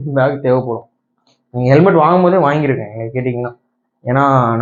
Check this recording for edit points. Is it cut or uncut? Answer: uncut